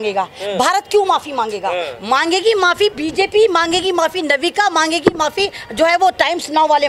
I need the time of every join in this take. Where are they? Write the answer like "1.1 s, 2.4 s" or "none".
none